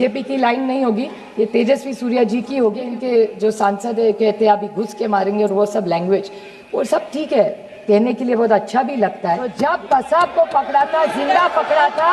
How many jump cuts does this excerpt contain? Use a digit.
2